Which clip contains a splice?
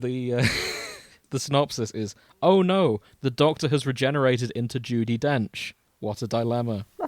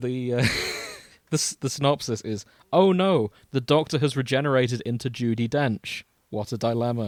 first; 1 cut; at 1.2 s

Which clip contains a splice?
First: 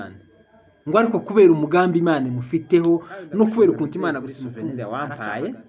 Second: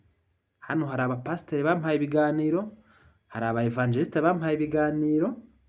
first; 1 cut; at 4.6 s

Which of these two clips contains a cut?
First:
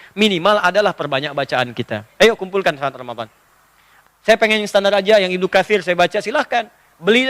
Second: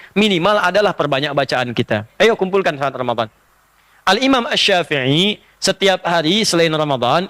first; 1 cut; at 3.9 s

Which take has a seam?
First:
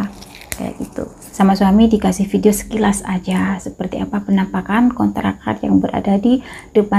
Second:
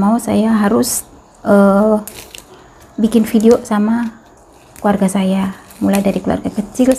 first; 1 cut; at 1.3 s

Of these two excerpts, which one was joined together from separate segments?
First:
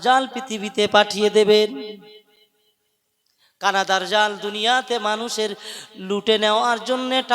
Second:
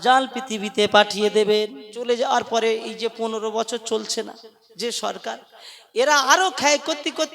second; 1 cut; at 1.9 s

